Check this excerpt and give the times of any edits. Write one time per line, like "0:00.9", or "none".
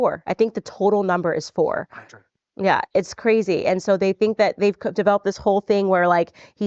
0:05.1